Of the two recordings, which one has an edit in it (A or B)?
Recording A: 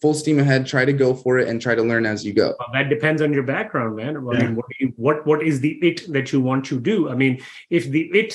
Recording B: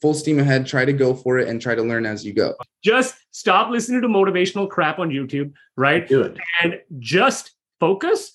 B